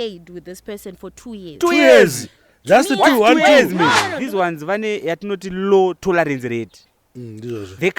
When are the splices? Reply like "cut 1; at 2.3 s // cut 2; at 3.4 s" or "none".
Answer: cut 1; at 4.2 s